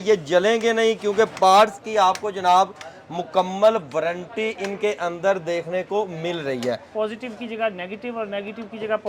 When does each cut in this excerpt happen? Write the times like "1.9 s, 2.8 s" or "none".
6.9 s